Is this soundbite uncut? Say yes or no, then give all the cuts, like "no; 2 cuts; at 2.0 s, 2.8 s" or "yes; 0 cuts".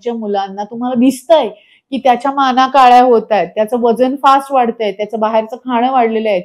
yes; 0 cuts